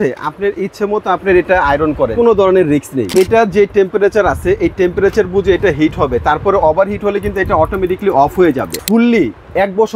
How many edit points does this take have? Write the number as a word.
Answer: three